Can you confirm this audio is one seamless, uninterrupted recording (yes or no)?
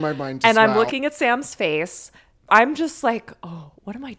no